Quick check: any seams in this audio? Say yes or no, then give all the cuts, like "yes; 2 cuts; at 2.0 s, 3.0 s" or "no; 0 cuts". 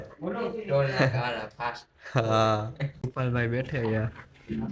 yes; 1 cut; at 3.1 s